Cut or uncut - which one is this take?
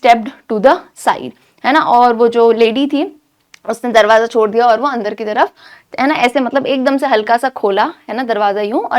uncut